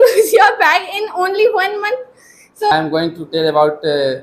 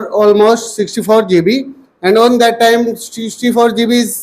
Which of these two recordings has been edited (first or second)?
first